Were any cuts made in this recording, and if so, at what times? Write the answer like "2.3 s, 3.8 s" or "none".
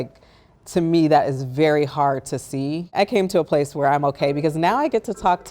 2.9 s